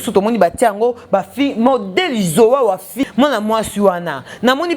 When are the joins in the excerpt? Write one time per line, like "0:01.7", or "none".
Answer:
0:03.0